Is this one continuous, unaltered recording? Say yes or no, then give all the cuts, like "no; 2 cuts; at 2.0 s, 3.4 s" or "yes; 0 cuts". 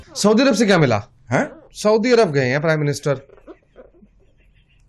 yes; 0 cuts